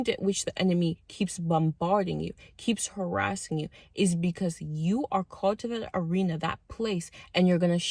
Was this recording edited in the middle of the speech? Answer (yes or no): no